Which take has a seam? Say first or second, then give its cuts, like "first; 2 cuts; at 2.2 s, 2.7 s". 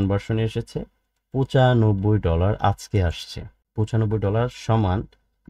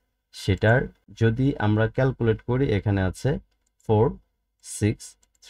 second; 1 cut; at 1.0 s